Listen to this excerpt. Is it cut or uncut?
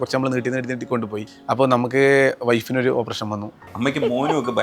cut